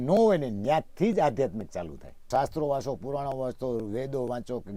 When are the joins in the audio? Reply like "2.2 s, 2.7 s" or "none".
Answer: 2.3 s